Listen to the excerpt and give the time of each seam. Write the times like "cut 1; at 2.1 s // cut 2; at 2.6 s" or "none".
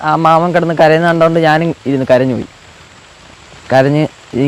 none